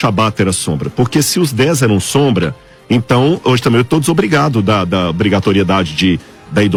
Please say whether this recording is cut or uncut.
uncut